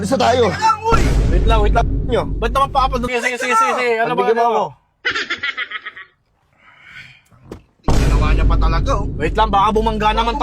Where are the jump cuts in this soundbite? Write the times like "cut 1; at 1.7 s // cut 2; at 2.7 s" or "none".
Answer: cut 1; at 3.1 s

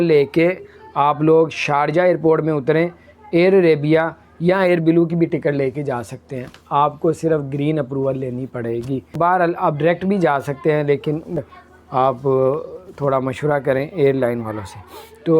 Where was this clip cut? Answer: cut 1; at 9.2 s // cut 2; at 11.4 s

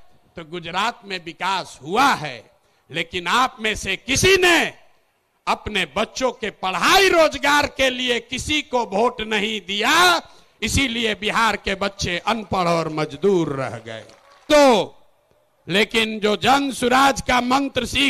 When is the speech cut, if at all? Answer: cut 1; at 14.5 s

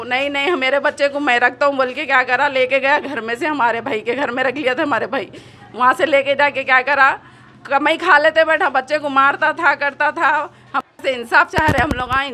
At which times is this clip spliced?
cut 1; at 10.8 s

